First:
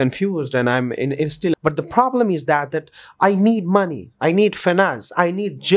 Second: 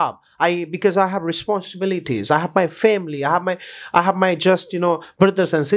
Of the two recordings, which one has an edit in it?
first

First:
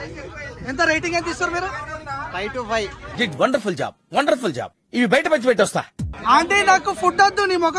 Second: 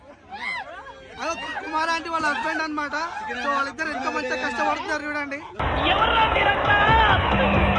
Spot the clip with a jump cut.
first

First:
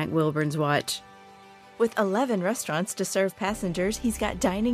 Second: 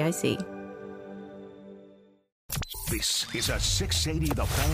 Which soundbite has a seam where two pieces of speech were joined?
second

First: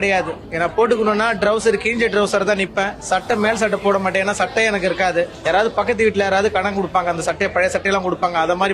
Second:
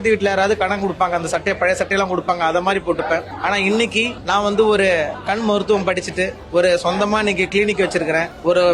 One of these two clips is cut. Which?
second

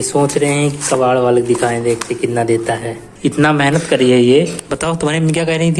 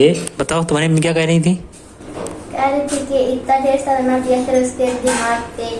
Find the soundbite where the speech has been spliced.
first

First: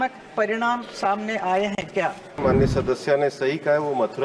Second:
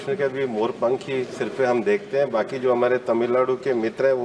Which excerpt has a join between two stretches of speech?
first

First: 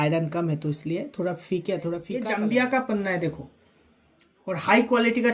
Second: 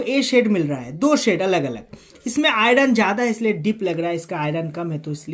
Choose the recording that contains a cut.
first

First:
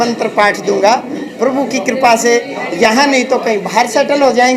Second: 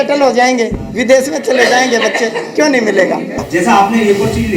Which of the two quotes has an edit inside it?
second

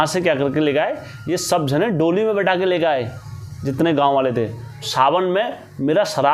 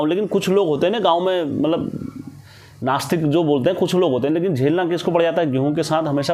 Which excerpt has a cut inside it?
first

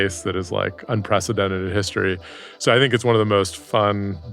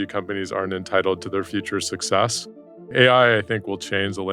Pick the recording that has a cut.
second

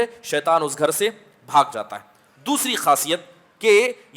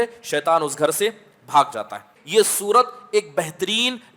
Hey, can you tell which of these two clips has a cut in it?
second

